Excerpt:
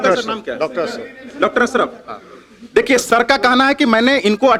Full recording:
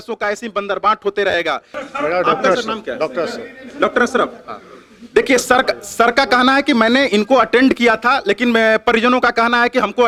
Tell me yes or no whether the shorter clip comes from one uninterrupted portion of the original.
no